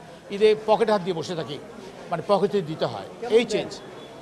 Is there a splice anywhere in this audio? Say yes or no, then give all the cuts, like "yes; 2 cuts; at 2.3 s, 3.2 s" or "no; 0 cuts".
no; 0 cuts